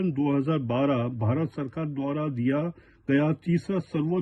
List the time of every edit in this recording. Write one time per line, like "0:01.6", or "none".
none